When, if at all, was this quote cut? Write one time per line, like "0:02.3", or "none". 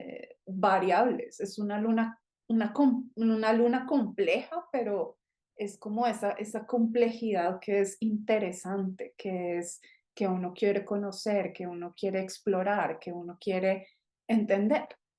none